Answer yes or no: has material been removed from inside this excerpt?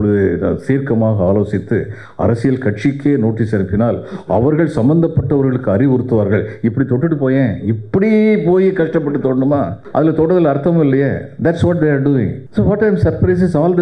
yes